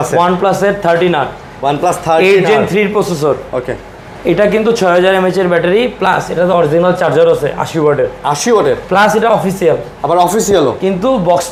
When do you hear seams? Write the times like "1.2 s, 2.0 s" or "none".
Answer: none

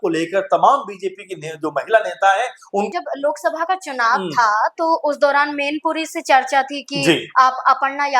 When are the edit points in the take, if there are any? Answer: 2.9 s

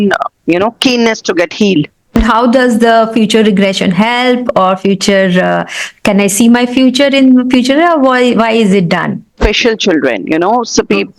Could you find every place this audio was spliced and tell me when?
2.1 s, 9.3 s

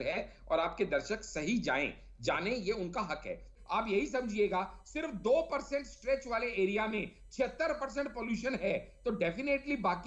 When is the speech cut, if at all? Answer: 3.6 s

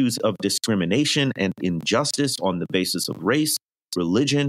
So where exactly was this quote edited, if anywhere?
none

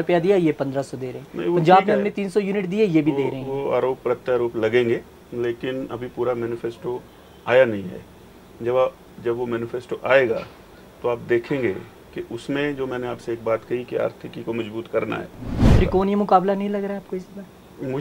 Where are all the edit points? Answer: 15.6 s

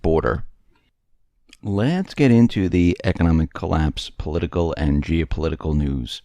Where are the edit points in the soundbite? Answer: 1.4 s

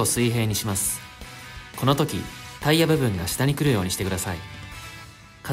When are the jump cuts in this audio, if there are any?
none

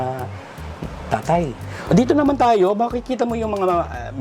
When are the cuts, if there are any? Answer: 1.7 s

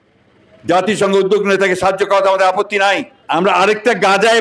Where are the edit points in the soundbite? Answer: 3.1 s

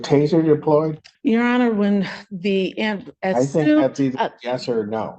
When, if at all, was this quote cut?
1.0 s

